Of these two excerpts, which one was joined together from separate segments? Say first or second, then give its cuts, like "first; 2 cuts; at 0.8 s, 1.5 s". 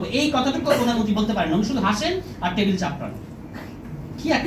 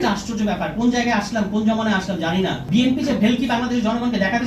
second; 1 cut; at 2.6 s